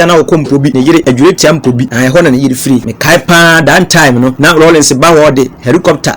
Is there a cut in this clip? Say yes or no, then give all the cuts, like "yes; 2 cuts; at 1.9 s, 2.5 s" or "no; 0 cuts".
yes; 4 cuts; at 0.8 s, 1.9 s, 2.9 s, 4.4 s